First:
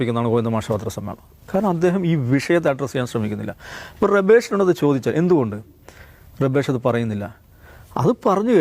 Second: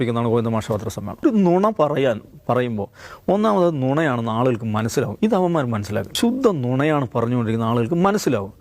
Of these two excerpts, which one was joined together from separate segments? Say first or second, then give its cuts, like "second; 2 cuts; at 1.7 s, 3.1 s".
second; 2 cuts; at 1.2 s, 6.1 s